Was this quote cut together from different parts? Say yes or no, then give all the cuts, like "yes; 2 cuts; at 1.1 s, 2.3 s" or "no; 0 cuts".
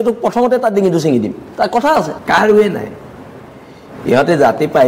yes; 1 cut; at 2.2 s